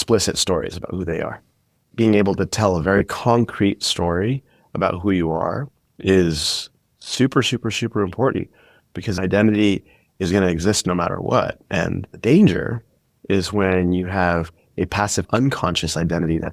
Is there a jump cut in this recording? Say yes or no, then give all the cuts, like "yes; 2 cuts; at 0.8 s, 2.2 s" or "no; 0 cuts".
yes; 2 cuts; at 1.8 s, 9.2 s